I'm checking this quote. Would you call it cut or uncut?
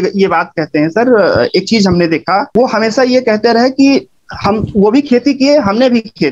cut